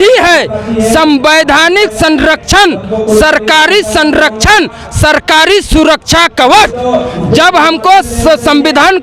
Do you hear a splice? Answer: no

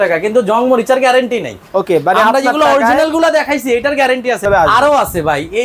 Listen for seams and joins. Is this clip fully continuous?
no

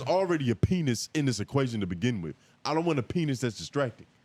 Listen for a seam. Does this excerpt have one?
no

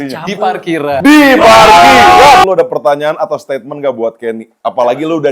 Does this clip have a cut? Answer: yes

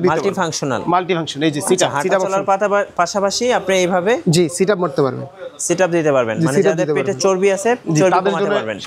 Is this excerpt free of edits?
yes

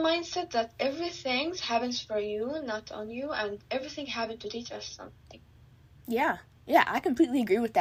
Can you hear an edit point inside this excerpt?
no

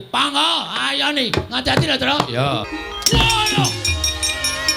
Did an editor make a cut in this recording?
yes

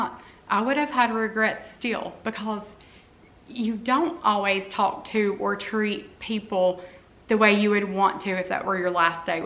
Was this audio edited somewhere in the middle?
no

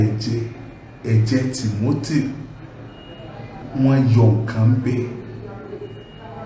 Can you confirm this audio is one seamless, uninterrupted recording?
no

